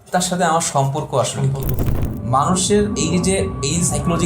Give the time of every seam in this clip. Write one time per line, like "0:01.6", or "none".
0:02.0